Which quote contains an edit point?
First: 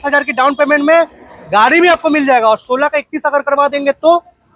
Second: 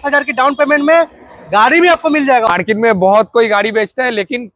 second; 1 cut; at 2.5 s

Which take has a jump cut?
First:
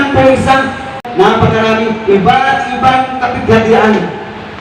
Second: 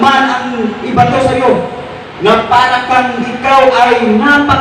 first; 1 cut; at 1.0 s

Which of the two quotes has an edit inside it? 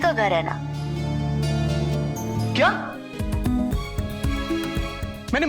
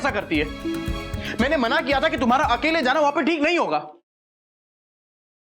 first; 1 cut; at 2.5 s

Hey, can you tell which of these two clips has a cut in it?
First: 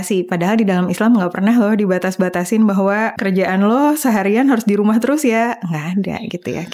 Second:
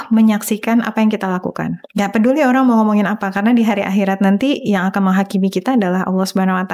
first; 1 cut; at 3.1 s

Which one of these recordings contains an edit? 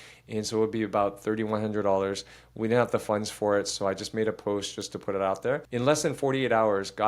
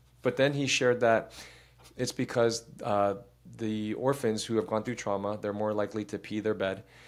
first; 1 cut; at 5.6 s

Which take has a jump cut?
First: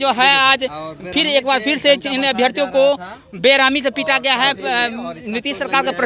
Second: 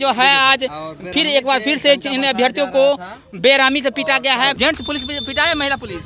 second; 1 cut; at 4.6 s

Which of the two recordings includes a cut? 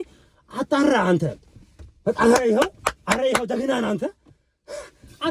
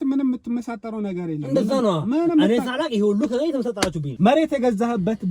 second; 1 cut; at 4.0 s

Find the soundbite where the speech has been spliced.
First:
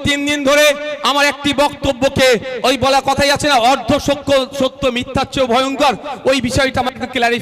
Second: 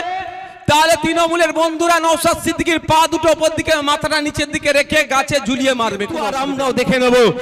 second; 1 cut; at 6.4 s

